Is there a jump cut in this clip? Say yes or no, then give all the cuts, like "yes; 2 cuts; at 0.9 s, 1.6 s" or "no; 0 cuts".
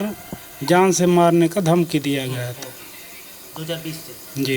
no; 0 cuts